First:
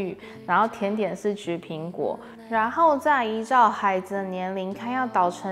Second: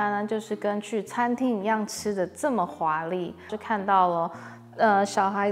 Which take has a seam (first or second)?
second